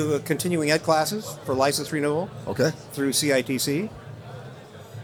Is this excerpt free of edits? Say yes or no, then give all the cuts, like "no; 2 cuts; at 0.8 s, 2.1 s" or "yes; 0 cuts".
yes; 0 cuts